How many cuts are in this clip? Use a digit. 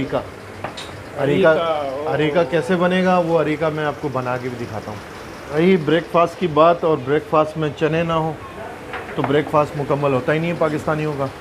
1